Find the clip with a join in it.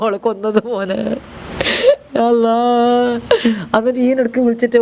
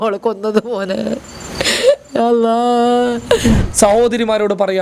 second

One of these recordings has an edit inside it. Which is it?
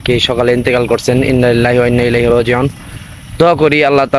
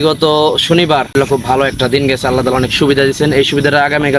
second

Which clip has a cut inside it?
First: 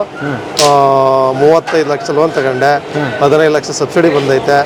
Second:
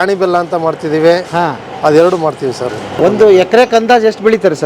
second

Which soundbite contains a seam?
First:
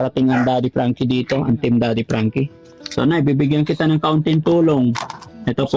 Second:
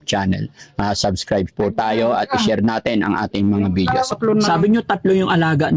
second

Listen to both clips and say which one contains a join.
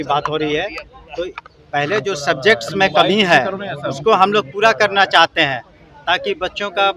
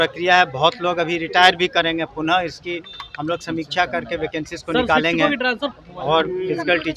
second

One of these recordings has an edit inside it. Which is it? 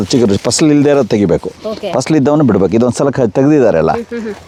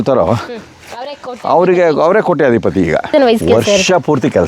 second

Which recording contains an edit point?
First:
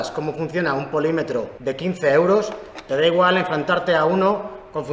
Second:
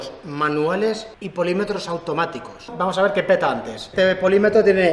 second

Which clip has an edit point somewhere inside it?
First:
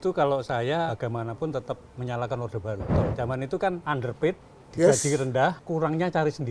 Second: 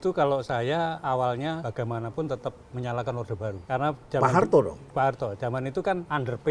first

